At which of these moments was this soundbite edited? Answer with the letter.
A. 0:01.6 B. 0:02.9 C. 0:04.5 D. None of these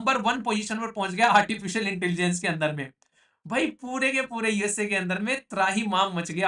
D